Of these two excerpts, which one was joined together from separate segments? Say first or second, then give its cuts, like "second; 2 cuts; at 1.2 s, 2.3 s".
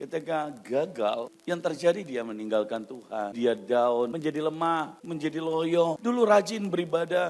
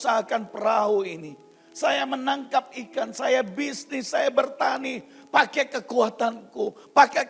first; 5 cuts; at 1.3 s, 3.3 s, 4.1 s, 5.0 s, 6.0 s